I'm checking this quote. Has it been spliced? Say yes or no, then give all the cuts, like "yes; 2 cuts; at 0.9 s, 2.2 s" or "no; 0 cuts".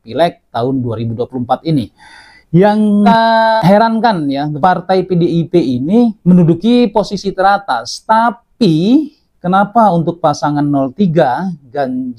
no; 0 cuts